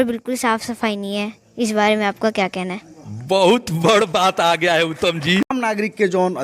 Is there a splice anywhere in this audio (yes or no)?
yes